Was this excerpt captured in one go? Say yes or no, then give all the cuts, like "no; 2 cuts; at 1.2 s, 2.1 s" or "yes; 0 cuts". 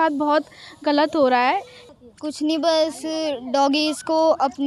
no; 1 cut; at 1.8 s